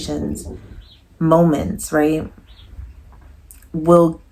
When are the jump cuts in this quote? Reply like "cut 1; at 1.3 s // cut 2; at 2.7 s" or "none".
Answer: none